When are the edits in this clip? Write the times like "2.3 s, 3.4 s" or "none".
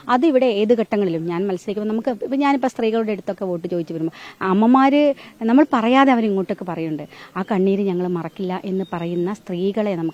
none